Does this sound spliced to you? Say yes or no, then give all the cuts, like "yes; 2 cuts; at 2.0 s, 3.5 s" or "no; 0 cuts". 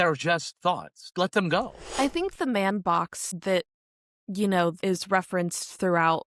yes; 4 cuts; at 1.0 s, 1.8 s, 3.2 s, 4.8 s